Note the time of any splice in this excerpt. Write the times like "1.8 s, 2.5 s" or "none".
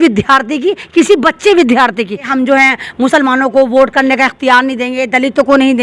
2.3 s

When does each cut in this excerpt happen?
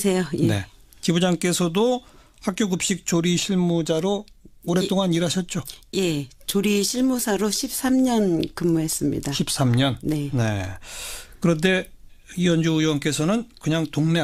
none

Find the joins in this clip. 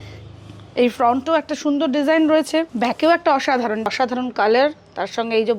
2.7 s, 3.9 s

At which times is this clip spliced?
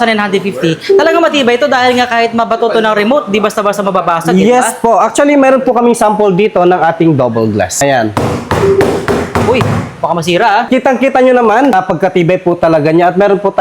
7.7 s, 10.7 s, 11.7 s

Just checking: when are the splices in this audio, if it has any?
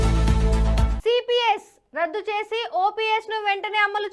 0.9 s

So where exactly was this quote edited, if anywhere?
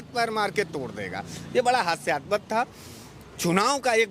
none

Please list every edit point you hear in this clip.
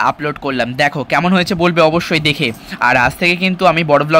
none

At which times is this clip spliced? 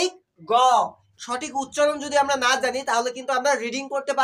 1.1 s

